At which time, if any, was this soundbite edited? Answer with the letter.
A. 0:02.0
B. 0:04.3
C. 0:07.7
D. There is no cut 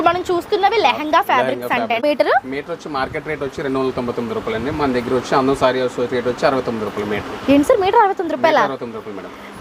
A